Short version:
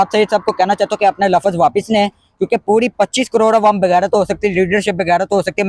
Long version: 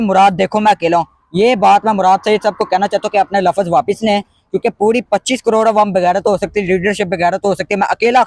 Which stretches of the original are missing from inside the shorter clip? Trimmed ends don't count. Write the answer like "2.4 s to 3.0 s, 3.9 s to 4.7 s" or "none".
none